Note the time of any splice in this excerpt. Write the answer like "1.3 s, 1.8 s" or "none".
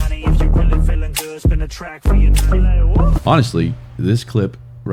3.2 s